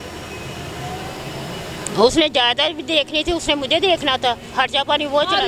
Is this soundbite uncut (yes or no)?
yes